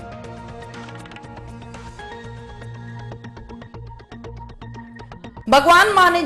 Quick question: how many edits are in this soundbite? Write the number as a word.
one